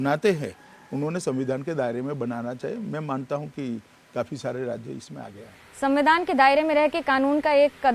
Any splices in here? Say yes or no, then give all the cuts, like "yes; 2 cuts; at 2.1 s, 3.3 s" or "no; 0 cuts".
no; 0 cuts